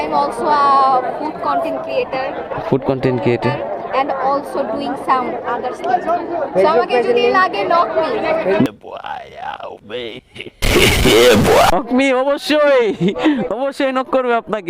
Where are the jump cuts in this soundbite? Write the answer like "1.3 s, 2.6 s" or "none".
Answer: 8.6 s, 11.7 s